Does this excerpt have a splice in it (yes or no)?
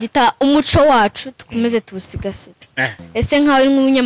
yes